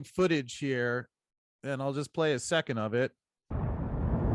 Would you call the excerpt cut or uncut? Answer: cut